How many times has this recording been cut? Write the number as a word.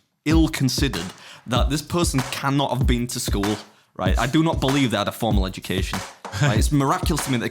zero